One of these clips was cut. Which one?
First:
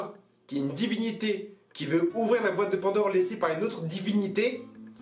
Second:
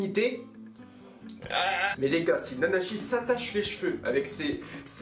second; 1 cut; at 1.9 s

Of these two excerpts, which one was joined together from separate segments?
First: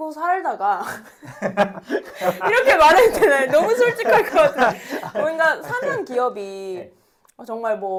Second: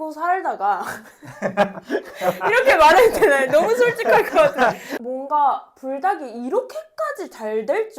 second; 1 cut; at 4.9 s

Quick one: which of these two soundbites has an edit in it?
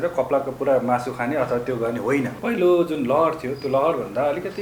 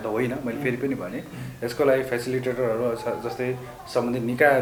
first; 1 cut; at 2.4 s

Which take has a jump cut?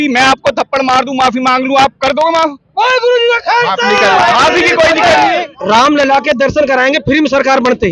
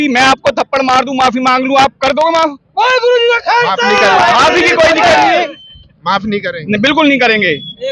first; 1 cut; at 5.5 s

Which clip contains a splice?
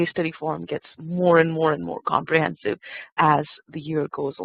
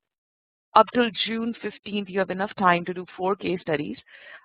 second; 1 cut; at 2.5 s

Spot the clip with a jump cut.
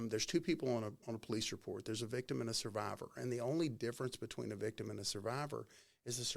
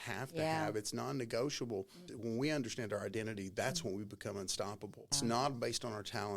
second; 2 cuts; at 2.0 s, 5.1 s

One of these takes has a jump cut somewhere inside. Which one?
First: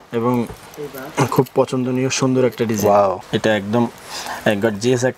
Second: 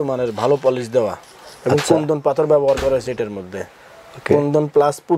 first; 1 cut; at 3.2 s

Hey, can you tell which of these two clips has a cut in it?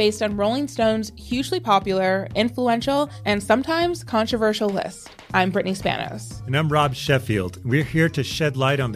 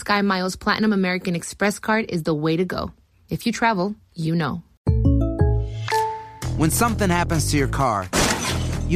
second; 2 cuts; at 4.7 s, 6.4 s

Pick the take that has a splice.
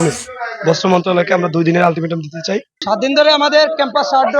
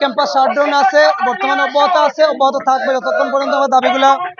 first; 1 cut; at 2.7 s

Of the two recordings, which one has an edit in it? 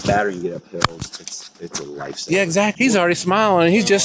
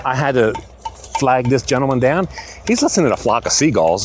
first; 1 cut; at 2.7 s

